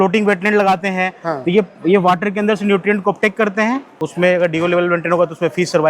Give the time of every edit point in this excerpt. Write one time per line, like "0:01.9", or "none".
0:04.0